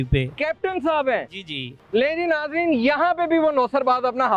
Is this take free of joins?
yes; 0 cuts

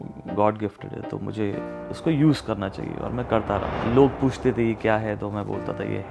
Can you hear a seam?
yes; 1 cut; at 3.7 s

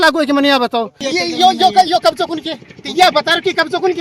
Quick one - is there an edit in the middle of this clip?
yes; 1 cut; at 1.1 s

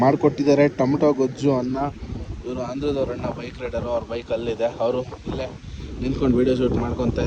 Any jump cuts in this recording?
no; 0 cuts

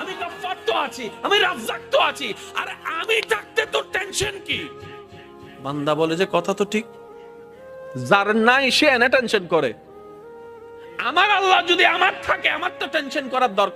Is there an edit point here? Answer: yes; 2 cuts; at 9.8 s, 11.0 s

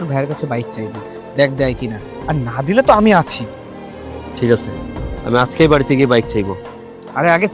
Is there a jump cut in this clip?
no; 0 cuts

